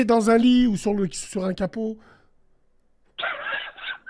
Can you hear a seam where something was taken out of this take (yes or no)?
no